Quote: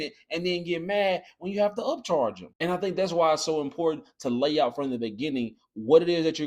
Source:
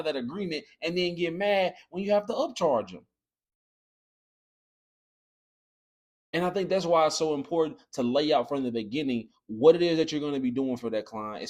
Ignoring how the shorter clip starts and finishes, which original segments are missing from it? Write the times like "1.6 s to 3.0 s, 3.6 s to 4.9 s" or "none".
3.0 s to 6.2 s